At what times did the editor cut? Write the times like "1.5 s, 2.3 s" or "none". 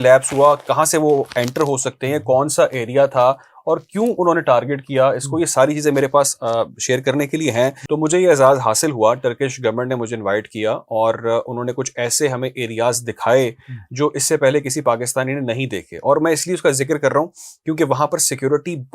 7.8 s